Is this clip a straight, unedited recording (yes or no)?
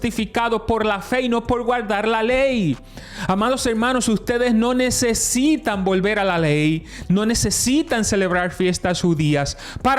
yes